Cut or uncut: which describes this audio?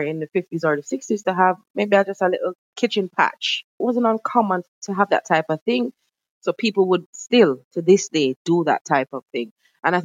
cut